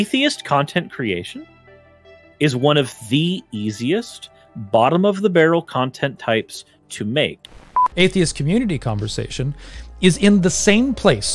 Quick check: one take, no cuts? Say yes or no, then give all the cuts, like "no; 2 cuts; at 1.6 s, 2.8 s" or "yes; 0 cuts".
no; 1 cut; at 7.4 s